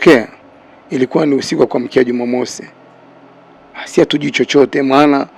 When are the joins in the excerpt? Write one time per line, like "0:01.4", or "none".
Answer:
none